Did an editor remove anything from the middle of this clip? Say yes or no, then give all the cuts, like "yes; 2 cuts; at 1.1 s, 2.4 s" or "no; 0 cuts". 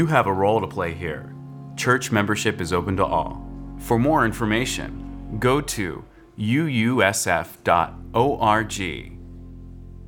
yes; 1 cut; at 9.0 s